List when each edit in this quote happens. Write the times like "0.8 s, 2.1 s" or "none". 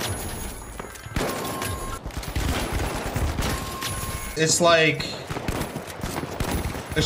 2.0 s, 4.3 s